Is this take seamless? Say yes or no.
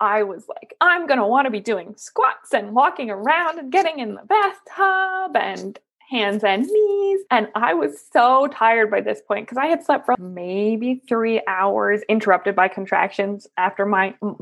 yes